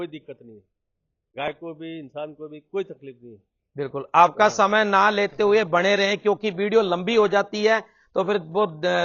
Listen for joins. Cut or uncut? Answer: uncut